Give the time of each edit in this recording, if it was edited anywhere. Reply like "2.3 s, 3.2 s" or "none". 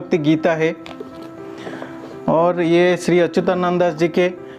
none